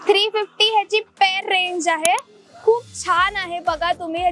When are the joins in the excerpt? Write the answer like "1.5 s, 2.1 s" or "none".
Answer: none